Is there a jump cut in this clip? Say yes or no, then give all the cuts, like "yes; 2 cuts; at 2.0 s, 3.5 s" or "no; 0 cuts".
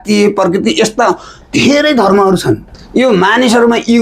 yes; 1 cut; at 2.7 s